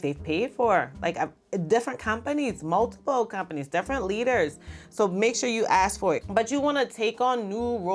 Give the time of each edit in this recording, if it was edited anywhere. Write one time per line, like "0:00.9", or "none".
0:06.4